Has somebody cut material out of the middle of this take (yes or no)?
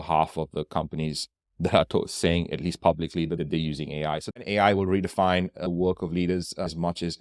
yes